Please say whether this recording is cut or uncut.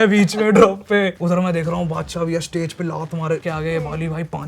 cut